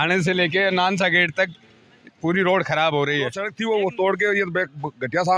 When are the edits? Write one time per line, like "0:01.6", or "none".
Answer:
0:03.5